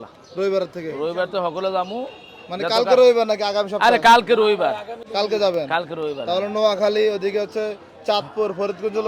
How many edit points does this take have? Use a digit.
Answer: 0